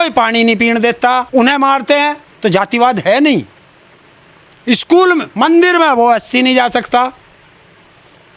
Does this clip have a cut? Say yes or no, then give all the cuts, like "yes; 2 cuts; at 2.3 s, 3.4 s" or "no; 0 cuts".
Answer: no; 0 cuts